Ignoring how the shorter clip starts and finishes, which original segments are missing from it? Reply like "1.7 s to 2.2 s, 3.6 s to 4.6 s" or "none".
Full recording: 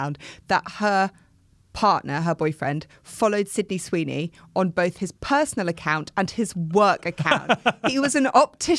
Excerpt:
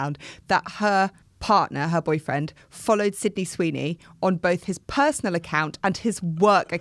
1.3 s to 1.6 s